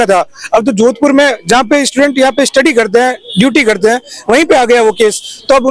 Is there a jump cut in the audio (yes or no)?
no